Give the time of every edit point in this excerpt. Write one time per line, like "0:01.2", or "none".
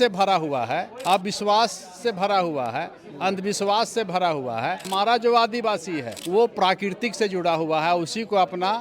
0:00.9
0:04.9
0:06.1